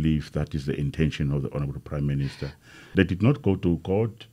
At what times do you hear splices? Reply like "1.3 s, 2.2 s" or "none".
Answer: 2.8 s